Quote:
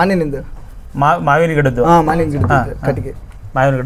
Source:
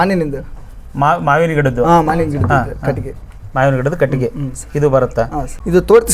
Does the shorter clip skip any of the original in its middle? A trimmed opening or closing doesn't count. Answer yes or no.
no